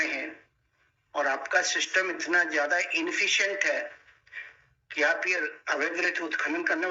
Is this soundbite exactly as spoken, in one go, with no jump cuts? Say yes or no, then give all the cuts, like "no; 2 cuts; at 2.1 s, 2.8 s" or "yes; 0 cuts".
yes; 0 cuts